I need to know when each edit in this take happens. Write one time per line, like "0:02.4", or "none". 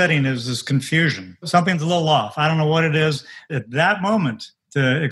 0:01.5
0:03.5

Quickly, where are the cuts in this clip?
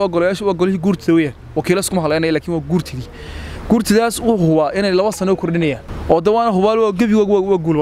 0:05.9

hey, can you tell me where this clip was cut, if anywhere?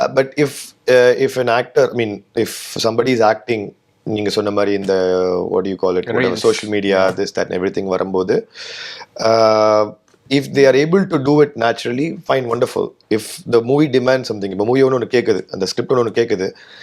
none

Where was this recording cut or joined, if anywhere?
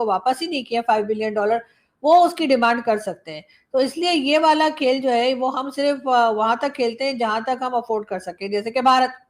none

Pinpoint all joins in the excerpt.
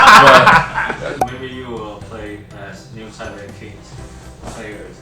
0:01.0

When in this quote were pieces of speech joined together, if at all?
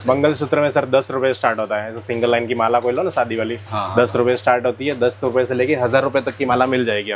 none

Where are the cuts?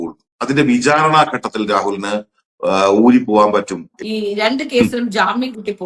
0:03.8

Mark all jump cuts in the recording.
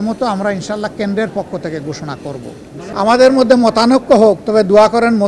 0:02.8

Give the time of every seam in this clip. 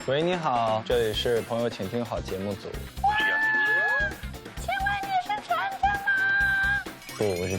0:00.8
0:02.8

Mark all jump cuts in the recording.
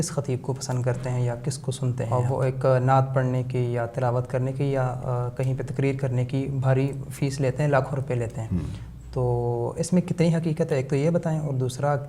0:02.0

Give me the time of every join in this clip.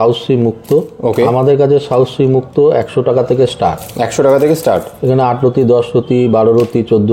none

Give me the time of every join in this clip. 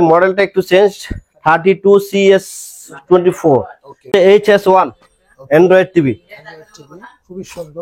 0:04.1

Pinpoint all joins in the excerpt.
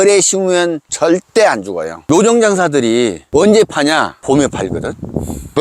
0:02.0

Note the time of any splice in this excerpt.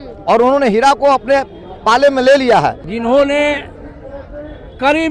0:02.9

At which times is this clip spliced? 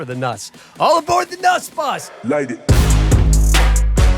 0:02.1

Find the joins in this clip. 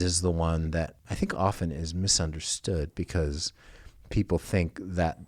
0:01.0

